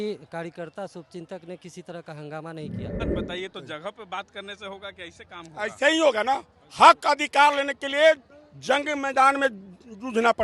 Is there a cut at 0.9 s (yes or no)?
no